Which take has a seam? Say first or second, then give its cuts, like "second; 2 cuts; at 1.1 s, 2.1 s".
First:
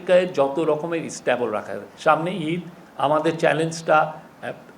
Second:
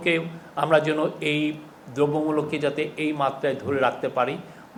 first; 1 cut; at 1.8 s